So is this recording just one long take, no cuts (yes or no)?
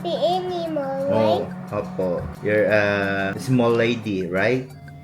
no